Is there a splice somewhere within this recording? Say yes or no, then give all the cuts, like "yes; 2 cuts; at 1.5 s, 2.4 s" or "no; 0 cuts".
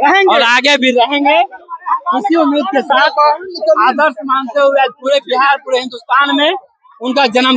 no; 0 cuts